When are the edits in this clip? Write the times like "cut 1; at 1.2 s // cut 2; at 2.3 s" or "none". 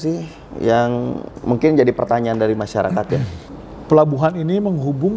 cut 1; at 3.4 s